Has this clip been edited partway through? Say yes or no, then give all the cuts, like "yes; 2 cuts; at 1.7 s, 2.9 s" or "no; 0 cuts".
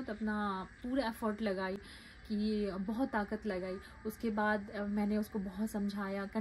no; 0 cuts